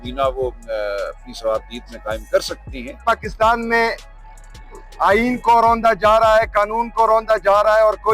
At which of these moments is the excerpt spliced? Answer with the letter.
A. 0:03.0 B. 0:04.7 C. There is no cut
A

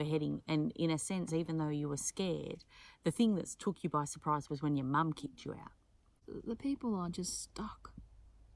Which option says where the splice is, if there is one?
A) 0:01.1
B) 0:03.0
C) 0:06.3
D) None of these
C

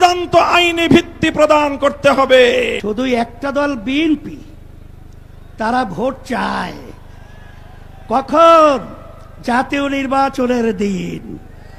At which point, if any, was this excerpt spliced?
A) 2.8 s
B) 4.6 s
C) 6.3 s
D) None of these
A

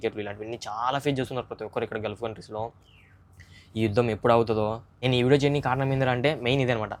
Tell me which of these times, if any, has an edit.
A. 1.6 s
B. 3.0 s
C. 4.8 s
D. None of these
D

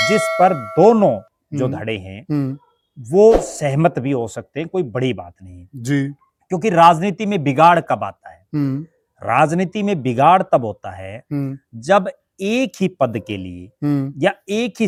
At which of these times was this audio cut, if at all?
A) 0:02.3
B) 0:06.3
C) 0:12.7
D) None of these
D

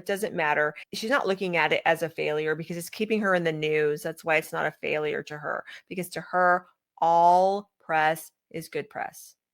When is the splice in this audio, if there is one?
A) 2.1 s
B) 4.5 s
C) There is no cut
C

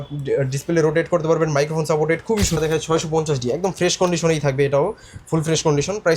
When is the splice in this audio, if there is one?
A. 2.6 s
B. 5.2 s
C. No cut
A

